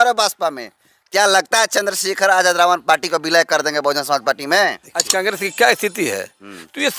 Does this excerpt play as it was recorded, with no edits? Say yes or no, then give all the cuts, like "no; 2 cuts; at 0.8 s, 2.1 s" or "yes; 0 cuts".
no; 1 cut; at 5.1 s